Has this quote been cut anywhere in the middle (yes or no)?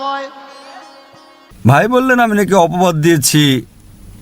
yes